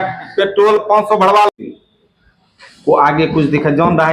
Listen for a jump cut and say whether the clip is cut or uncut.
uncut